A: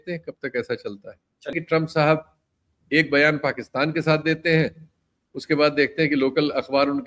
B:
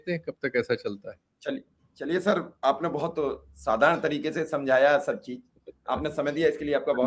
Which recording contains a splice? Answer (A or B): A